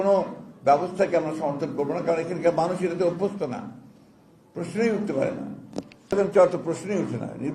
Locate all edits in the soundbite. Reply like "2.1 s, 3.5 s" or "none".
6.1 s